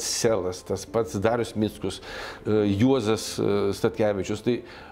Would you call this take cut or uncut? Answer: uncut